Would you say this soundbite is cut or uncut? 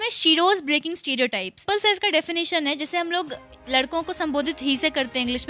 cut